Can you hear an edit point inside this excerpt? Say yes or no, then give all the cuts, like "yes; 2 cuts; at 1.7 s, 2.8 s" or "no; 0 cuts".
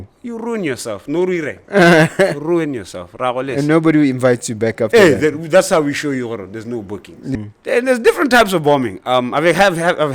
yes; 1 cut; at 7.3 s